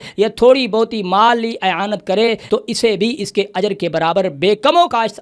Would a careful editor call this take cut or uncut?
cut